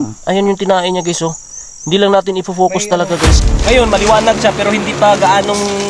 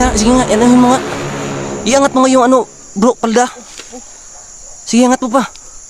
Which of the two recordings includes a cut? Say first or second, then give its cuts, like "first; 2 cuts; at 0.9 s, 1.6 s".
first; 1 cut; at 3.5 s